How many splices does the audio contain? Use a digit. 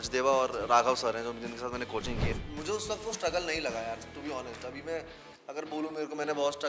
1